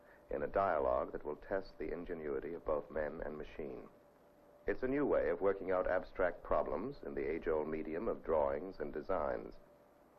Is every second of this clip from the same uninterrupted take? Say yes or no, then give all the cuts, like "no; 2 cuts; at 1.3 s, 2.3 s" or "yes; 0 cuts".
yes; 0 cuts